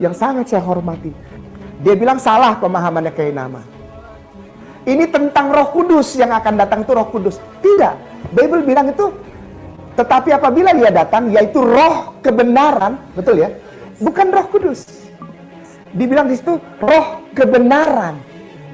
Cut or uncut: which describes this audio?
uncut